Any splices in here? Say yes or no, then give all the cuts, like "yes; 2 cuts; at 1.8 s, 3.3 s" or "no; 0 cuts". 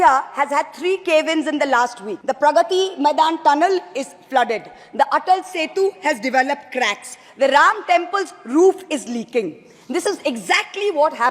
yes; 1 cut; at 2.1 s